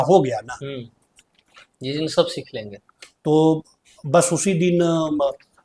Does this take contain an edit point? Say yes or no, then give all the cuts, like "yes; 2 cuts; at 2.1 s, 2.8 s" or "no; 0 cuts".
no; 0 cuts